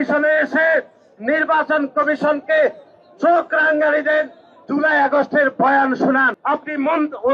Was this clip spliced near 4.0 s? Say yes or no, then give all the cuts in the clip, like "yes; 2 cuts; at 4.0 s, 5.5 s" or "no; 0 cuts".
no; 1 cut; at 6.3 s